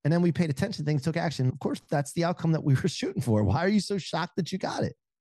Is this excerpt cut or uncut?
cut